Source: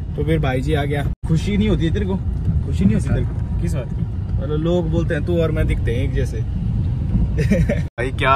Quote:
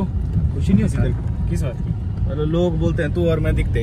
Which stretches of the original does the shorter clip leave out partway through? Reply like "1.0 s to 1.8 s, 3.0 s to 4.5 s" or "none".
none

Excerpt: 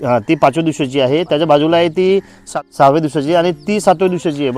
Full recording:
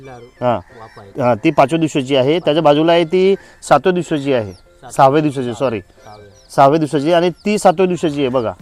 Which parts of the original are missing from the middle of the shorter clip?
3.5 s to 6.2 s

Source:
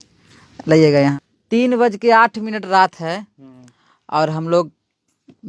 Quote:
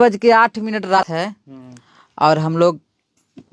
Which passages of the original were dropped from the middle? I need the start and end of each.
2.8 s to 2.9 s

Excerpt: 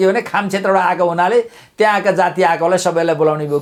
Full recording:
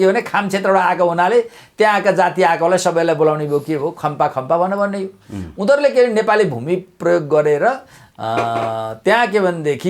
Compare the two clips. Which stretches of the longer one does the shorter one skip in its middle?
none

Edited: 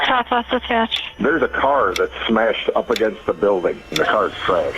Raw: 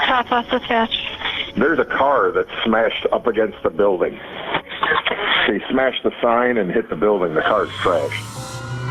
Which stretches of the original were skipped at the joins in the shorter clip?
1.0 s to 1.4 s, 4.3 s to 7.3 s

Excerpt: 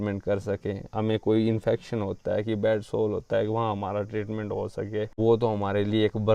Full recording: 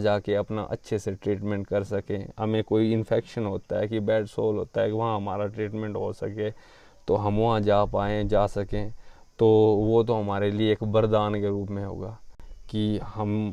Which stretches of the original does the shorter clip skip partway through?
6.6 s to 9.8 s

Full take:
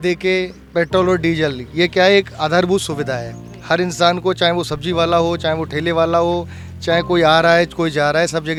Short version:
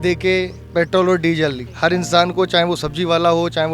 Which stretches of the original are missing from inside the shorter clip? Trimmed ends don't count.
1.6 s to 3.5 s

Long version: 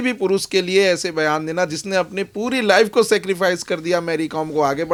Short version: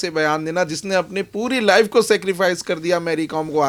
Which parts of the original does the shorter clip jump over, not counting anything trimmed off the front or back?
none

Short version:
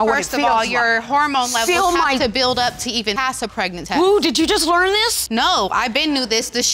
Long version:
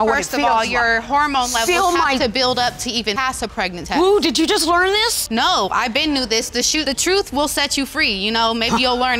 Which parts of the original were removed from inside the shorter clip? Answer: none

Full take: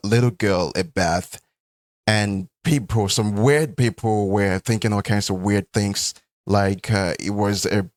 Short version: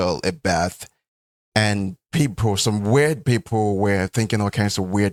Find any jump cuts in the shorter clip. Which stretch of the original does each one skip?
none

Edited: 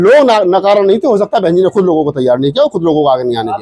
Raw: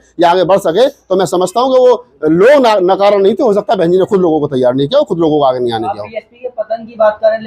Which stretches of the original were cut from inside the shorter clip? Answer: none

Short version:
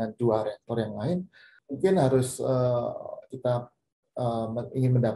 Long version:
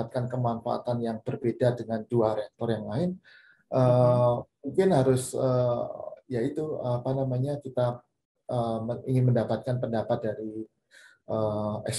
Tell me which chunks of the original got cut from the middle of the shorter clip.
3.5 s to 4.5 s, 6.2 s to 7.6 s

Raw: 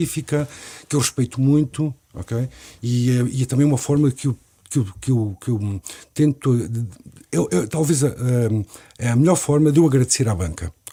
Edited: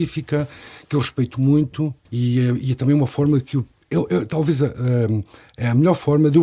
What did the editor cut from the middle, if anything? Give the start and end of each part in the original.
2.0 s to 2.7 s, 4.5 s to 7.2 s

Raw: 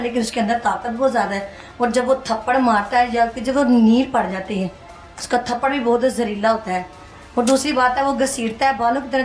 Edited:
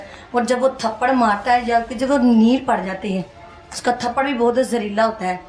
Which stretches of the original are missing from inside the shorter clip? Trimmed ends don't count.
none

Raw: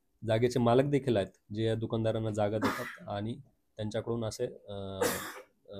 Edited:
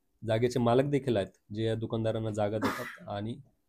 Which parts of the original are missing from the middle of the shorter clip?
none

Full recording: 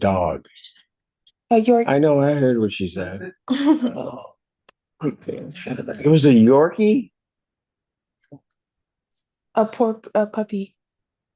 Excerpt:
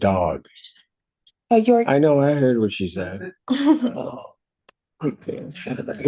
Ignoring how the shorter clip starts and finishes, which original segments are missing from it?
none

